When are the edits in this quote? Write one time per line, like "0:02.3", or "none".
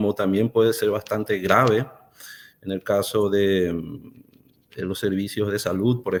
none